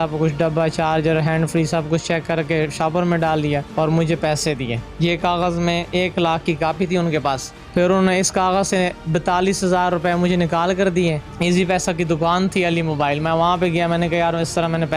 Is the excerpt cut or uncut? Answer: cut